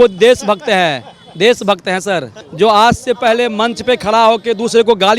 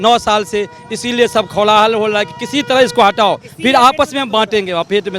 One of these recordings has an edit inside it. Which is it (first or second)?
first